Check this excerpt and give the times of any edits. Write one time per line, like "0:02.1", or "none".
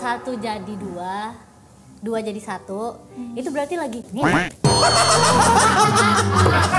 none